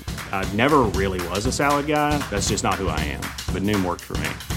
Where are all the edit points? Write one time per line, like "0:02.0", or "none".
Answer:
none